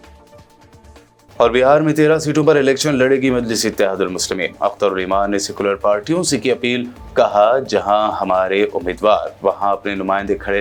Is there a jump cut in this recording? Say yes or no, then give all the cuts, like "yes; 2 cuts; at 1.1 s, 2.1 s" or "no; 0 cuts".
no; 0 cuts